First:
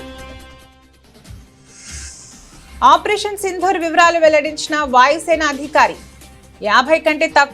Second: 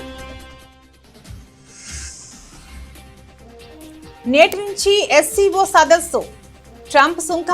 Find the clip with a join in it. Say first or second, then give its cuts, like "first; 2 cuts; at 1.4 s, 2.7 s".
first; 1 cut; at 2.8 s